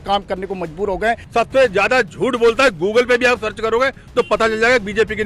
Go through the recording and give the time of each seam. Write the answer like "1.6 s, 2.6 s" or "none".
1.2 s